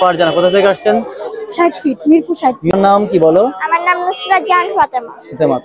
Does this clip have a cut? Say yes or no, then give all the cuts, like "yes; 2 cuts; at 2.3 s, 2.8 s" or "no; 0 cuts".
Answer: yes; 1 cut; at 2.7 s